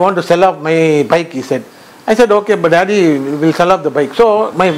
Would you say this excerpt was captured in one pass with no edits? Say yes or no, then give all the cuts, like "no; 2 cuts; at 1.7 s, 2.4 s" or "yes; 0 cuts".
yes; 0 cuts